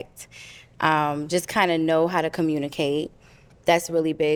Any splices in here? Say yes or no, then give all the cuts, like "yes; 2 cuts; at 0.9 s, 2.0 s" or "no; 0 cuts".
no; 0 cuts